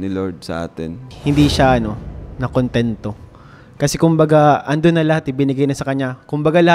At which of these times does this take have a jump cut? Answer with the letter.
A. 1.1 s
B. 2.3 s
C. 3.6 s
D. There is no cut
A